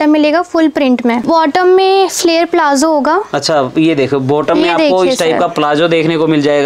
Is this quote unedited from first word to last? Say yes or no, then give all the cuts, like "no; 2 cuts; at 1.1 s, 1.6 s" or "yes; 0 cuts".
yes; 0 cuts